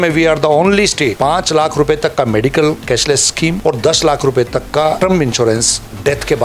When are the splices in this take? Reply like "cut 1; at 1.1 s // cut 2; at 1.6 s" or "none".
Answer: cut 1; at 1.2 s // cut 2; at 3.6 s // cut 3; at 5.0 s